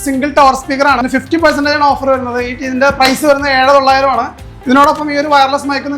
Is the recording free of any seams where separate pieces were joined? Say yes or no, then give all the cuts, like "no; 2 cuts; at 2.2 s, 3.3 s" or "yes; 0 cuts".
no; 1 cut; at 1.0 s